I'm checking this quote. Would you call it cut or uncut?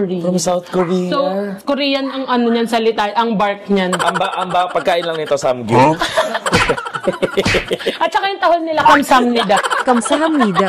uncut